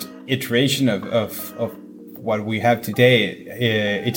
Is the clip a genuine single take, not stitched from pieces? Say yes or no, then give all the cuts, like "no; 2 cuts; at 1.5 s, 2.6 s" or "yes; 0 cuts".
yes; 0 cuts